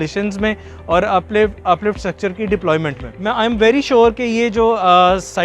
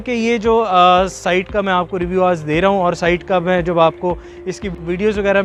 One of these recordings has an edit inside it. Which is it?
first; 1 cut; at 3.1 s

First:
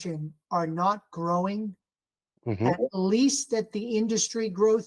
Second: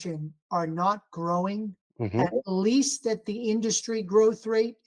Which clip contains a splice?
second; 1 cut; at 1.8 s

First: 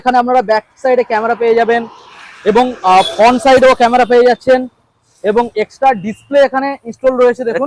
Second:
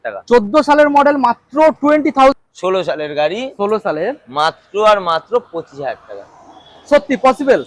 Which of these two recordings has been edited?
second; 1 cut; at 2.3 s

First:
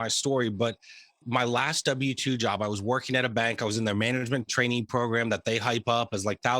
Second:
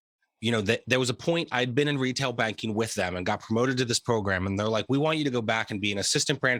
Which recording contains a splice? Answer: first; 1 cut; at 1.2 s

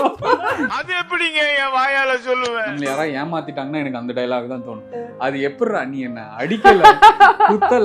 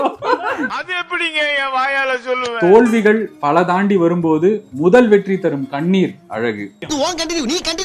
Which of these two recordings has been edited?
first; 1 cut; at 2.6 s

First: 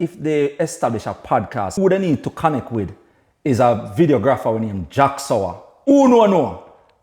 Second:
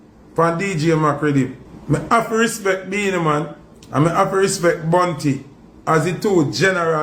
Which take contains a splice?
first; 2 cuts; at 1.7 s, 5.8 s

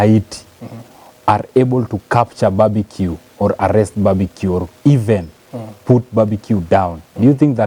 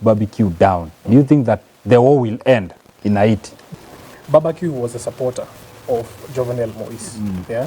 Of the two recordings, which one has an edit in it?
second; 1 cut; at 3.6 s

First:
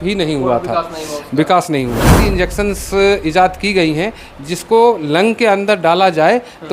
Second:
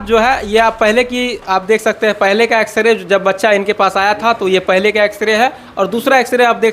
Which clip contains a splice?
first; 1 cut; at 2.1 s

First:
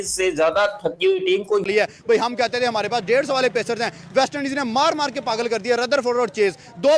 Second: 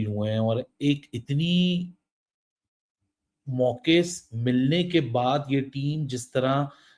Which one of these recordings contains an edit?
first; 1 cut; at 1.6 s

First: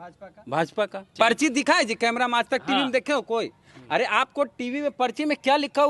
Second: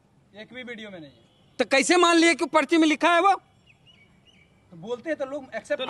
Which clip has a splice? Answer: first; 1 cut; at 1.1 s

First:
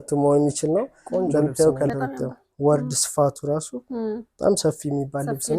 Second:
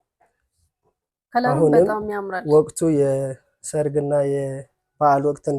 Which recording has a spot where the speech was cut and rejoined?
first; 1 cut; at 1.9 s

